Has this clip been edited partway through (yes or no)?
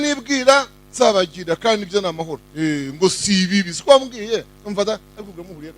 no